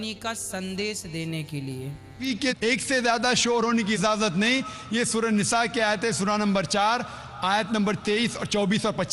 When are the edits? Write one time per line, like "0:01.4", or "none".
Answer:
0:02.2